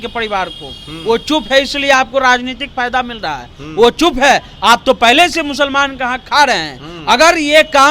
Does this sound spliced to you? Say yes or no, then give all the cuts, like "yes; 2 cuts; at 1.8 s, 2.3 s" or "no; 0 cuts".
no; 0 cuts